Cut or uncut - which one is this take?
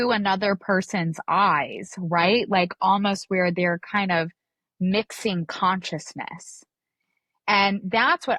uncut